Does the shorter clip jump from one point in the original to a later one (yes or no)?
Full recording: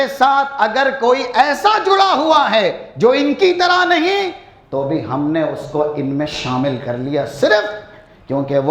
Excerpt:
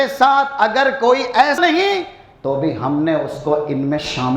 yes